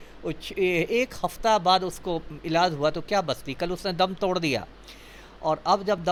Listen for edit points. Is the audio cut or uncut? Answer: uncut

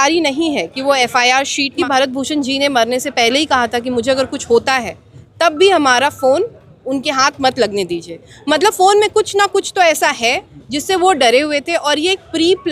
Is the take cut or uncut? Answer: cut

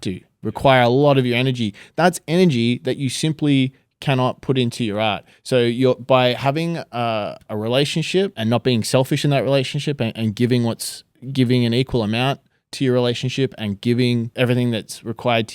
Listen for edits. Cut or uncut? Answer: cut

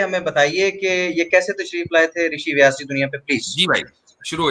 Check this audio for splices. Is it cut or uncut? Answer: uncut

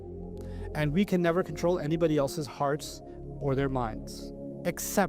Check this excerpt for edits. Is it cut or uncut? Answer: uncut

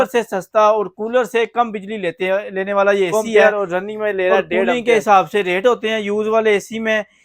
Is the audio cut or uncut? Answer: cut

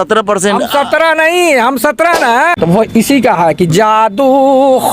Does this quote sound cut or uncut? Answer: cut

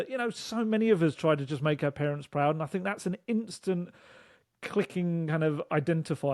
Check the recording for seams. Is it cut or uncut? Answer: uncut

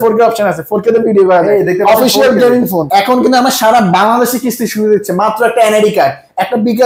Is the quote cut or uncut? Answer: cut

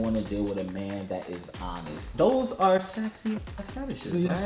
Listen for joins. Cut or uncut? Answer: cut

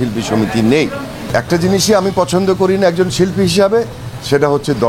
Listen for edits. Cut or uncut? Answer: cut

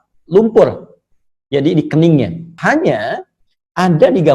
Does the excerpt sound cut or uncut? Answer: cut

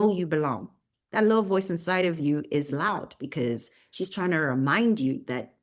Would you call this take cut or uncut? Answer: uncut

